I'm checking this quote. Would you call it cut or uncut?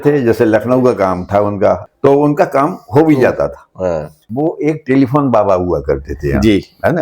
cut